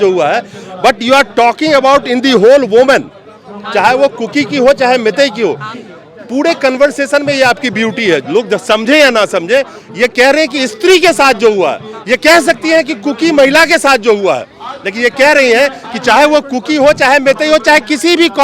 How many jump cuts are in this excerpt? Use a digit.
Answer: 0